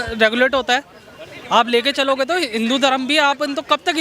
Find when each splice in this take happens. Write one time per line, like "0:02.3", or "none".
none